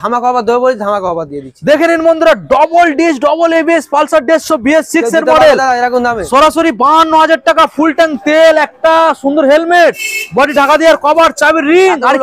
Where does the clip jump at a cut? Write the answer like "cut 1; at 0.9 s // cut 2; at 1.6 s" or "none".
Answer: none